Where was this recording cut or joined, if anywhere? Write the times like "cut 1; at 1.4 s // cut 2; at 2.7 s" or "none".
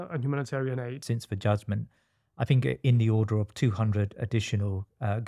cut 1; at 1.0 s